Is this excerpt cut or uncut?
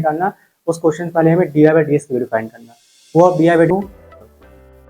cut